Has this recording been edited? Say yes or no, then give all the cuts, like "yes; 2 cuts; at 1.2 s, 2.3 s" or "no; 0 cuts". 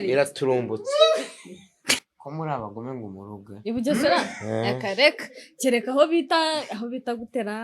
yes; 1 cut; at 2.1 s